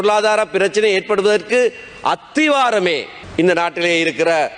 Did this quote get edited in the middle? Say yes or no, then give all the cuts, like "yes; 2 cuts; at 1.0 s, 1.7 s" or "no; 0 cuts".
yes; 1 cut; at 3.2 s